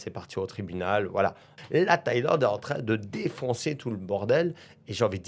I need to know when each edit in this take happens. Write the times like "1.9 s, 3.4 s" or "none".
1.6 s